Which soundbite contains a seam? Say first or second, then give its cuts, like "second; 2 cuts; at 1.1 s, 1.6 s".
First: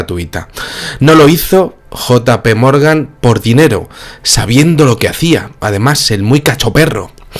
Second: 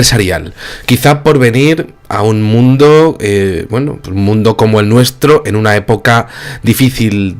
second; 1 cut; at 3.2 s